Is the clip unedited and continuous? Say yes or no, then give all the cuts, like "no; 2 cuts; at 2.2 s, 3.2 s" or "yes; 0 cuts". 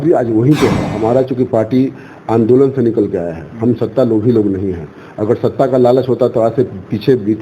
no; 1 cut; at 0.9 s